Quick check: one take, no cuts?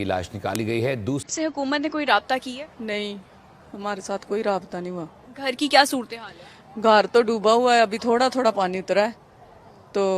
no; 1 cut; at 1.3 s

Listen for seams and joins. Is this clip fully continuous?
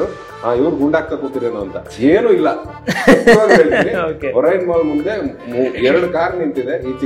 yes; 0 cuts

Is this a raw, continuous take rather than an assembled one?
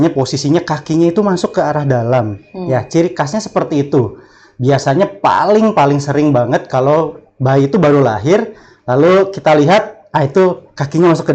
yes; 0 cuts

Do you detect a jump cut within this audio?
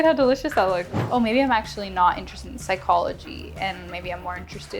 yes; 1 cut; at 1.0 s

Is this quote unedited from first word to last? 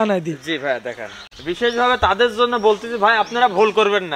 no; 1 cut; at 1.3 s

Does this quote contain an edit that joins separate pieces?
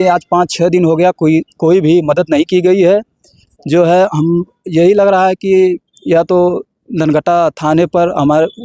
no; 0 cuts

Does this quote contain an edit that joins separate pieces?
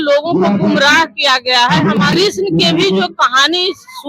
yes; 1 cut; at 2.1 s

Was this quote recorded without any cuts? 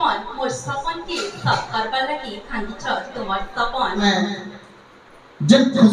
no; 1 cut; at 4.0 s

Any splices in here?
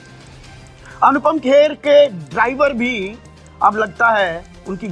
yes; 1 cut; at 1.0 s

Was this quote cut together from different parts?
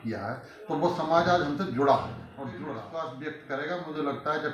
yes; 1 cut; at 2.2 s

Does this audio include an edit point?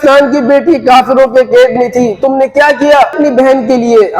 yes; 1 cut; at 3.2 s

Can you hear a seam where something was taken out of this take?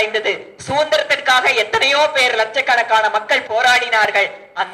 yes; 1 cut; at 3.4 s

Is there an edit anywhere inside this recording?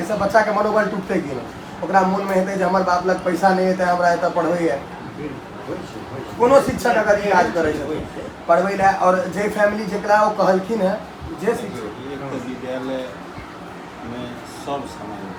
no; 0 cuts

